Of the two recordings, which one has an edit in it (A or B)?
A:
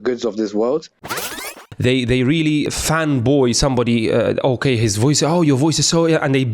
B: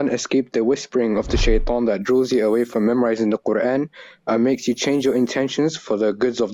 A